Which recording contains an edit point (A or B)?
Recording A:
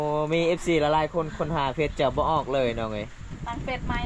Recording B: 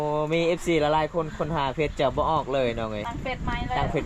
B